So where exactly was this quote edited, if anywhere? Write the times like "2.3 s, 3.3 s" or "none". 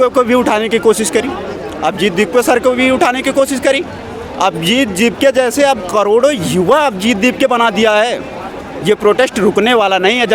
none